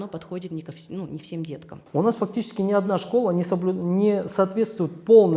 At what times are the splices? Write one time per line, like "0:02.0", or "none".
0:01.8